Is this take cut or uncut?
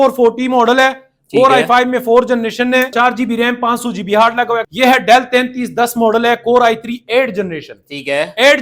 cut